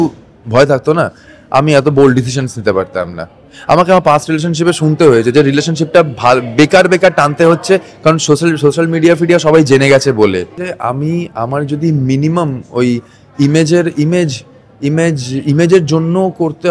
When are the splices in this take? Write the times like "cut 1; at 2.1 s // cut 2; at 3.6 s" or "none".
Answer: none